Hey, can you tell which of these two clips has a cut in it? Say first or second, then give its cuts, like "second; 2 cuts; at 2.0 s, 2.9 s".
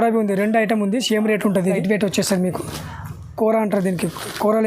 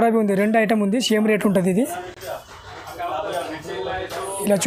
first; 1 cut; at 1.8 s